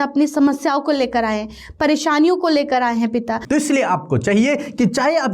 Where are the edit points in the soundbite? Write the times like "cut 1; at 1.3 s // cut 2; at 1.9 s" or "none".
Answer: cut 1; at 3.4 s